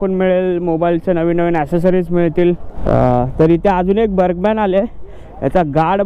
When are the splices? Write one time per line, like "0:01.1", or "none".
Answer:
0:02.7

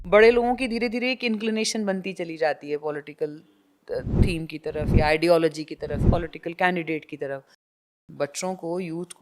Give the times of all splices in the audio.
0:06.0
0:07.8

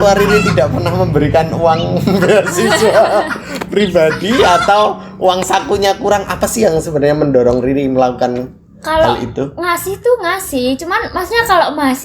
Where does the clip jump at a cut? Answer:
none

